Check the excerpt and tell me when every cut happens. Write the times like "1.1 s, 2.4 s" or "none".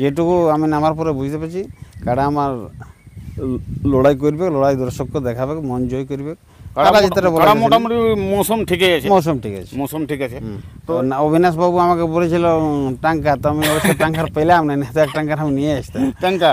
11.0 s

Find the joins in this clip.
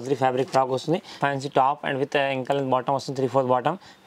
1.1 s

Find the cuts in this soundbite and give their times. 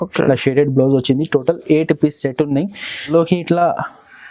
3.0 s

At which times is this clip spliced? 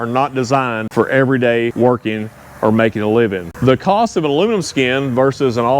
0.8 s, 1.7 s, 3.5 s

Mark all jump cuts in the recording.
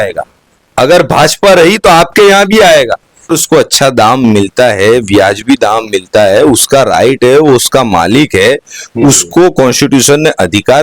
3.3 s

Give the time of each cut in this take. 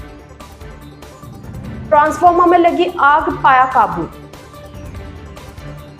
none

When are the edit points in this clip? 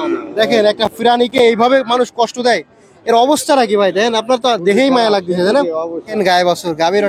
6.1 s

